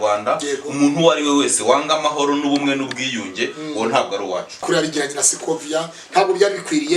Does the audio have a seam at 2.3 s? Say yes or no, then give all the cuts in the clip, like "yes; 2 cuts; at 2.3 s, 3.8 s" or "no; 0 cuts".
no; 1 cut; at 4.6 s